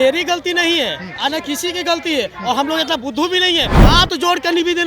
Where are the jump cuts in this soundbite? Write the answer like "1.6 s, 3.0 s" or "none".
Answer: 3.7 s

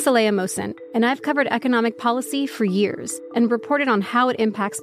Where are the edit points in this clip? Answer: 3.1 s

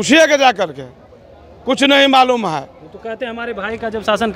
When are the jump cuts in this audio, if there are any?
none

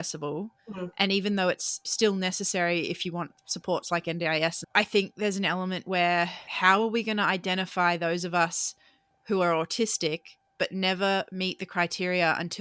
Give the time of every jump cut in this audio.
1.9 s

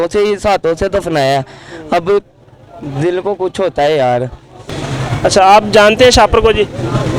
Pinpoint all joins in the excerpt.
4.9 s

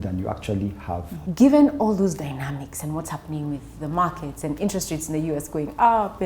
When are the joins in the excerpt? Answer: 1.1 s

